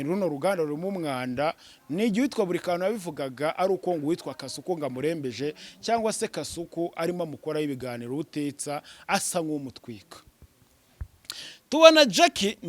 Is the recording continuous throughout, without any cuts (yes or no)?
yes